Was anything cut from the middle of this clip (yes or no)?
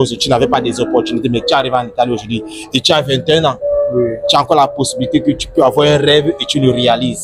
no